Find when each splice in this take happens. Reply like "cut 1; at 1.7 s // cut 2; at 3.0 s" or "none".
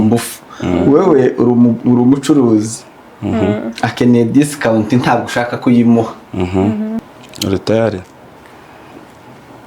cut 1; at 7.2 s